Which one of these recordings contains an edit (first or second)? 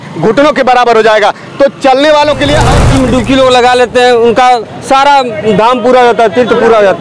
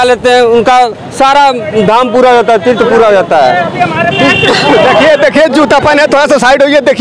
first